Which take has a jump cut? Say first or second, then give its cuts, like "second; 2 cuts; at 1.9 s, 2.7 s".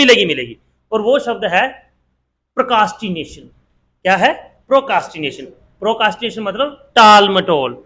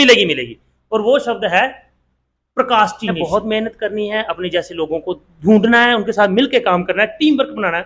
second; 1 cut; at 3.2 s